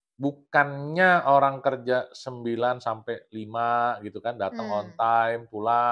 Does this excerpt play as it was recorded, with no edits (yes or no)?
yes